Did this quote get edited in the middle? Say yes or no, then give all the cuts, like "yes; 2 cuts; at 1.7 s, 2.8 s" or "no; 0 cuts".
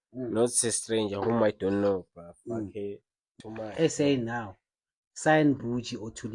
yes; 1 cut; at 3.3 s